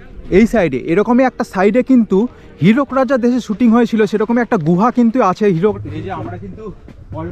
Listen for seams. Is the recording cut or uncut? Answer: cut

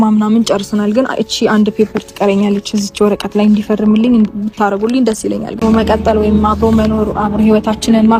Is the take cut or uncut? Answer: cut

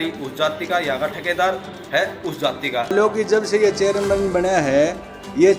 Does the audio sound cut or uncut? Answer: cut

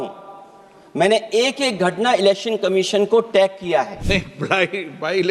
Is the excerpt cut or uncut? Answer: cut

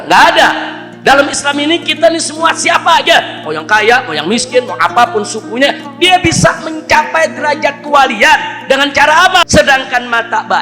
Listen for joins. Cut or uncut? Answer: cut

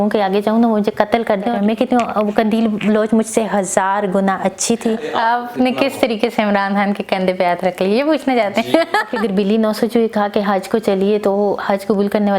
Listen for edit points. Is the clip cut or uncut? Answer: cut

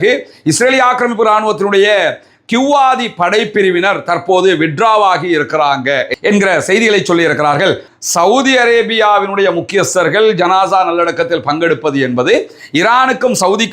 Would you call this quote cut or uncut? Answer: cut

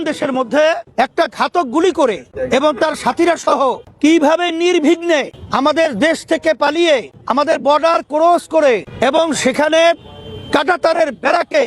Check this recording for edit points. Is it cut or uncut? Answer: cut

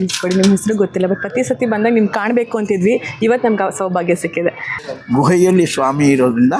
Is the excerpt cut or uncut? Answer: cut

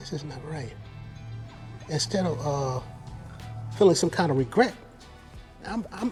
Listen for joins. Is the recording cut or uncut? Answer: uncut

